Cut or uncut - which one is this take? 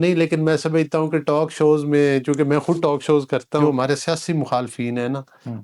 cut